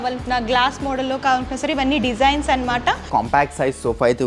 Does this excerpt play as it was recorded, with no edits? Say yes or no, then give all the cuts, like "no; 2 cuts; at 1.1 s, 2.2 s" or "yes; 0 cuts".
no; 1 cut; at 3.0 s